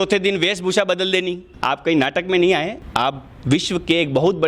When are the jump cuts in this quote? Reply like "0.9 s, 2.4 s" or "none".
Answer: 1.5 s, 2.8 s